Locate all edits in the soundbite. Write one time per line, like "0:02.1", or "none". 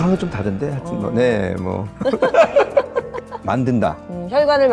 0:03.4

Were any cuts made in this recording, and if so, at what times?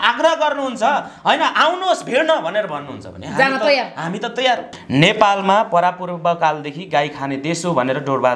0:04.7

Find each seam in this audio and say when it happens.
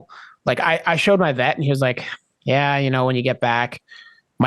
none

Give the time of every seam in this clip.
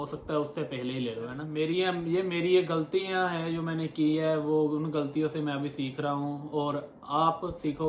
0:01.4

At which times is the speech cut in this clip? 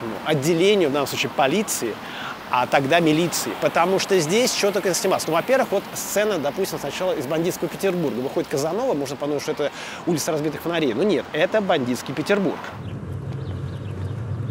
none

